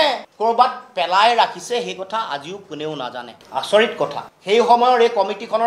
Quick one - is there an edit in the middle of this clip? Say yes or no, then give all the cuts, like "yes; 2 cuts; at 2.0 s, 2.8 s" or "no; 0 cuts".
no; 0 cuts